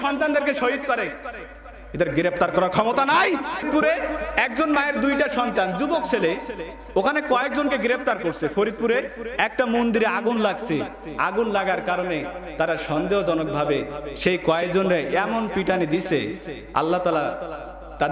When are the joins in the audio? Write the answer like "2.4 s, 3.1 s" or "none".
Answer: 3.6 s